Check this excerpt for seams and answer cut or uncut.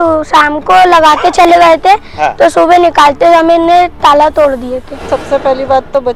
cut